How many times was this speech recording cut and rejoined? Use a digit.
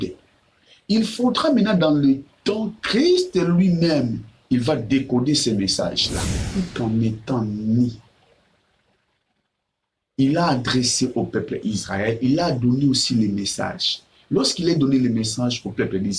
1